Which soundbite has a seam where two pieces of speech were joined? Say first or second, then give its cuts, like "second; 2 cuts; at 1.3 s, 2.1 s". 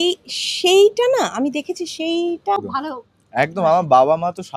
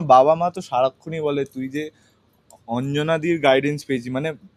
first; 1 cut; at 2.6 s